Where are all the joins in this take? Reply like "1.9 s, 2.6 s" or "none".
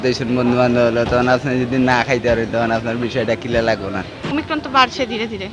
4.3 s